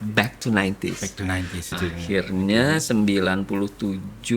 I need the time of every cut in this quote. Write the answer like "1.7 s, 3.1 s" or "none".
1.8 s